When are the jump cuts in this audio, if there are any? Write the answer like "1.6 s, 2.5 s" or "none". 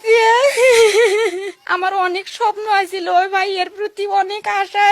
1.5 s